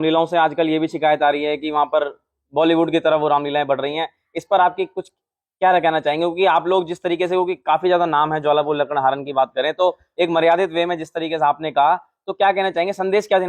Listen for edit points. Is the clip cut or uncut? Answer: uncut